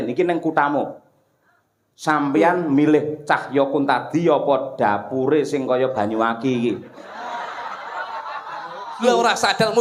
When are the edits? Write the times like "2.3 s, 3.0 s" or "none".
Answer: none